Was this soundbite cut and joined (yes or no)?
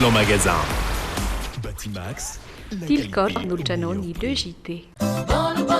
yes